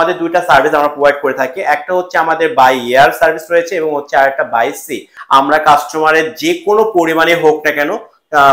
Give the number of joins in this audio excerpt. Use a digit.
1